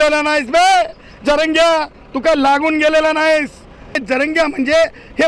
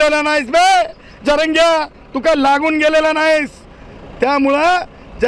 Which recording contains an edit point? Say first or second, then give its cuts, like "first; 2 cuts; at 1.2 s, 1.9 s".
first; 1 cut; at 4.0 s